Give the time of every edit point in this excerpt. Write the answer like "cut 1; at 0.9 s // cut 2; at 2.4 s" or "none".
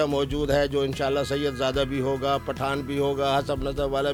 none